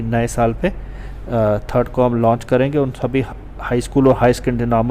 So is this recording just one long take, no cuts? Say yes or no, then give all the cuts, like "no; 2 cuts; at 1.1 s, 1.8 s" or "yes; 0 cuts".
yes; 0 cuts